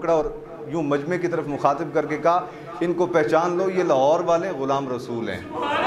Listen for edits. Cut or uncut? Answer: uncut